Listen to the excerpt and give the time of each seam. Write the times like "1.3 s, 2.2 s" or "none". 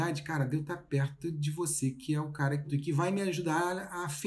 2.7 s